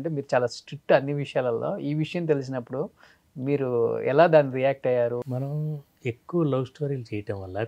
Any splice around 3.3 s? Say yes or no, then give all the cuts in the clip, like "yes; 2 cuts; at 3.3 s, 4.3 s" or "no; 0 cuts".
no; 1 cut; at 5.2 s